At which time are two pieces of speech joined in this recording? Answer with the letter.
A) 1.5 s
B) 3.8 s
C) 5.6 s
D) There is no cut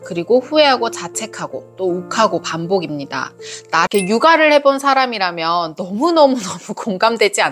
B